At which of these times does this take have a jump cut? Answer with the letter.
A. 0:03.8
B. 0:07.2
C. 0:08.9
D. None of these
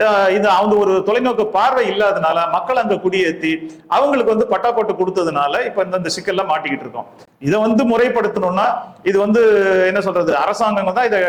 D